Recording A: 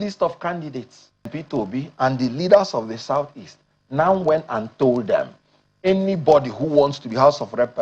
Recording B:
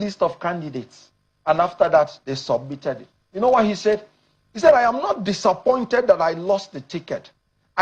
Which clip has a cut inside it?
A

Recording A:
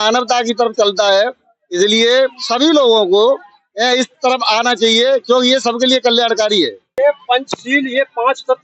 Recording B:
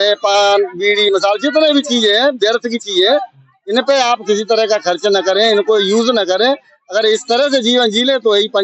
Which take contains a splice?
A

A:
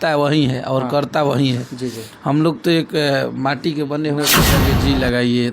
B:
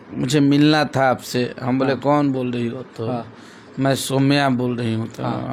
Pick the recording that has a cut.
A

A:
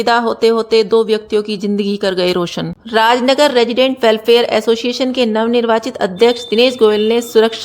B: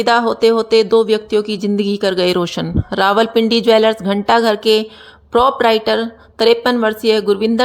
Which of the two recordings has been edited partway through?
A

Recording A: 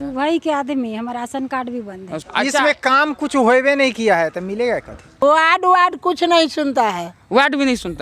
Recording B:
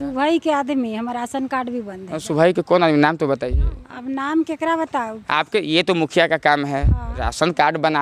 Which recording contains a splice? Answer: A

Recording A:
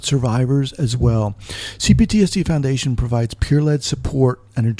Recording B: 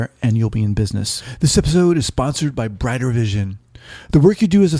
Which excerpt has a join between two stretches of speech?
B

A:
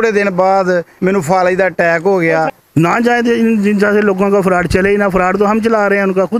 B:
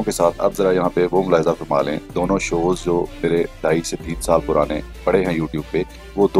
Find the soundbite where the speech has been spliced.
A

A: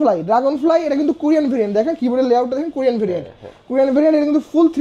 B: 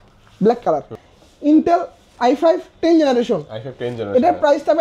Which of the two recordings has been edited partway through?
B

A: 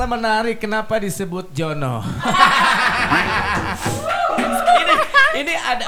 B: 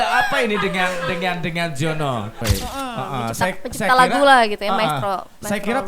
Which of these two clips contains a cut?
B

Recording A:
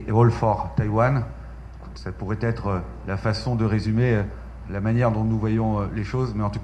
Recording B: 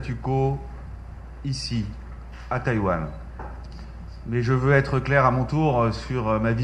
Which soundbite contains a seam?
B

